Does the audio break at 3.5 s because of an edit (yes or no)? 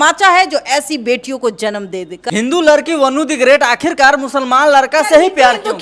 no